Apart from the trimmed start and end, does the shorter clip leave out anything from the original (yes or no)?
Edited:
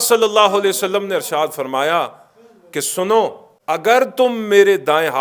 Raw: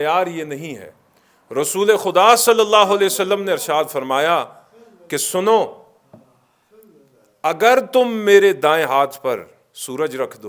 yes